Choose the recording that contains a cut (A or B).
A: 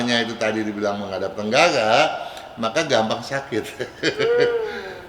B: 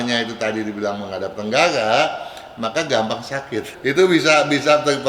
B